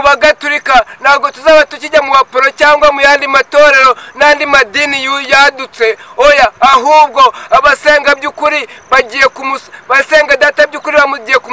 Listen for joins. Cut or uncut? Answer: uncut